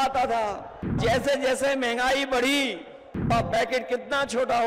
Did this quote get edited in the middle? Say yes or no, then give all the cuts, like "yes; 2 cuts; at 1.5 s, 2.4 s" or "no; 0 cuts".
yes; 2 cuts; at 1.0 s, 3.3 s